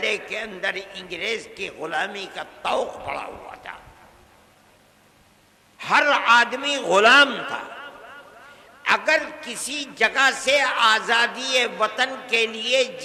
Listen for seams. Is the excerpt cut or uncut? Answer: uncut